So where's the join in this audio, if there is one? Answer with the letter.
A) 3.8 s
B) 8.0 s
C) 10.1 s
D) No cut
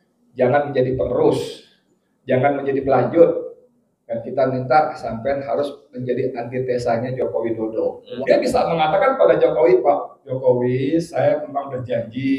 B